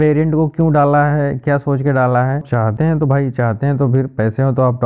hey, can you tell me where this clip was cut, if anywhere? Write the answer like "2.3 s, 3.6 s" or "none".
2.4 s